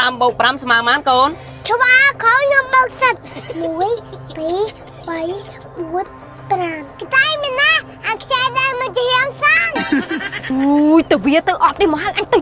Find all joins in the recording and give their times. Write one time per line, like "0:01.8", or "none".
none